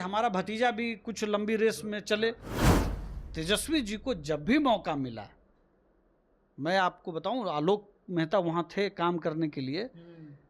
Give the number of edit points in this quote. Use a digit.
1